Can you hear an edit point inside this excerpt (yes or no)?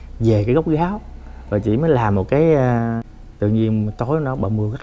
yes